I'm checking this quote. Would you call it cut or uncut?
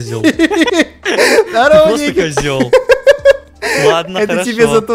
uncut